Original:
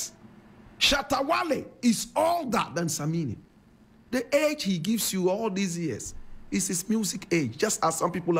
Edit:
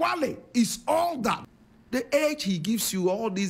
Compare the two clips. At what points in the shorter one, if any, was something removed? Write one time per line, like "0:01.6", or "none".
0:01.4